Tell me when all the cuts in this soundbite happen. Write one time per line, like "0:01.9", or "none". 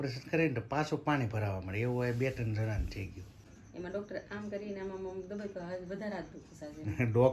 0:03.6